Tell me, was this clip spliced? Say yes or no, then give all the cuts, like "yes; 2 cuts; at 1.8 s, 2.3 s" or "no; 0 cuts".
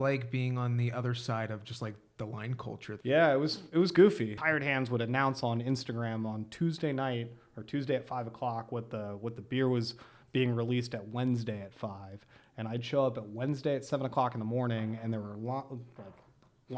yes; 2 cuts; at 2.9 s, 4.3 s